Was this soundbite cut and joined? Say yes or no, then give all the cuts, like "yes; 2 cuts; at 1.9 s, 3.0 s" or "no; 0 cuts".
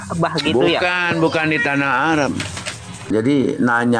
yes; 1 cut; at 3.1 s